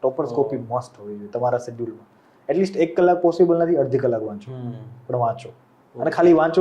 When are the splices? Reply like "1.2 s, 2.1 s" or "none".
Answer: none